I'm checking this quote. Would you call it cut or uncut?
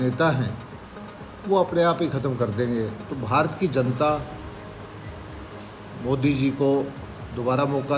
cut